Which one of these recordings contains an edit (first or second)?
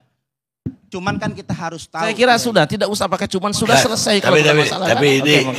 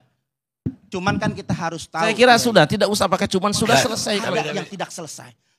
second